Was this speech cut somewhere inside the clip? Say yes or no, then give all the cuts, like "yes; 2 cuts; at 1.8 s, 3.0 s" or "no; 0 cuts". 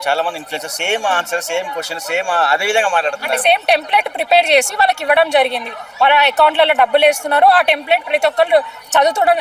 no; 0 cuts